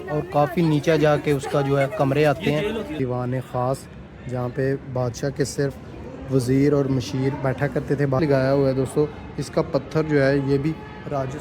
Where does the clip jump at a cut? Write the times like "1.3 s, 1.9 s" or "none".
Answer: 2.9 s, 8.2 s